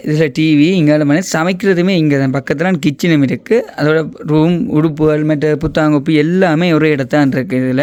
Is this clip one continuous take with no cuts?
yes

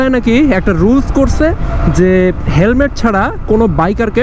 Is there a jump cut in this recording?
no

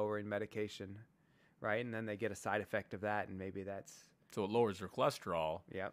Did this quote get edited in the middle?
no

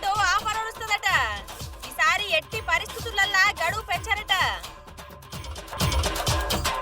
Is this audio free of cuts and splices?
no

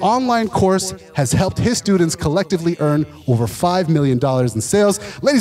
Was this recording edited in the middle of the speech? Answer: no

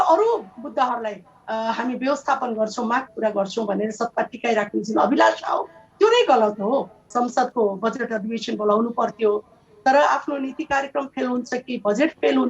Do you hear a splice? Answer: yes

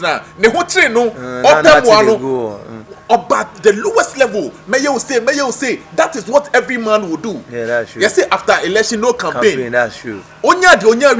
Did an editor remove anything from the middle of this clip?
no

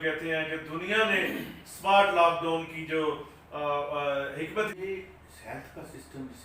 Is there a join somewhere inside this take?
yes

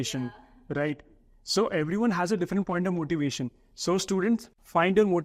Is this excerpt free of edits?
yes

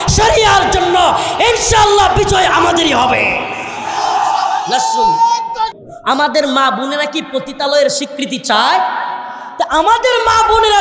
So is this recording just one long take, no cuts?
no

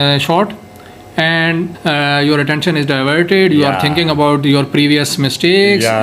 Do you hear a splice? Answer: yes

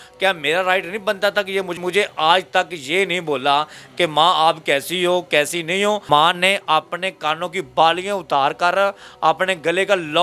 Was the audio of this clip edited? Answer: yes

